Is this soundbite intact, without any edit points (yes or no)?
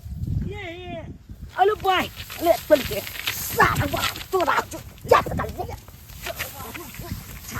yes